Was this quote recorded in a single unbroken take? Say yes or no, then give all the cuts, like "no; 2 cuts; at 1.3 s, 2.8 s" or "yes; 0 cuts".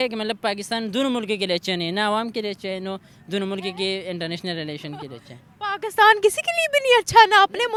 yes; 0 cuts